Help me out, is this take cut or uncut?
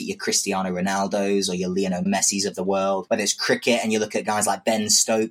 cut